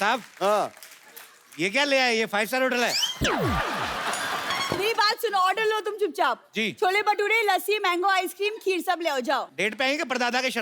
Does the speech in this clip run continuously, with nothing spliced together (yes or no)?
no